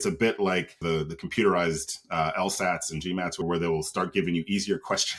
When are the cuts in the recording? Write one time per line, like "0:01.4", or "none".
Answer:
0:00.8
0:03.4